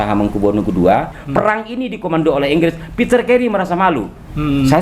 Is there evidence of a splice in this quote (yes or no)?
yes